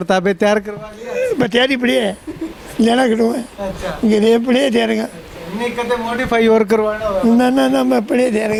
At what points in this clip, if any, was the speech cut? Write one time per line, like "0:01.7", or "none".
none